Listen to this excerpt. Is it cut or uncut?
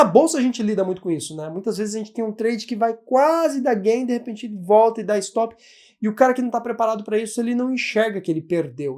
uncut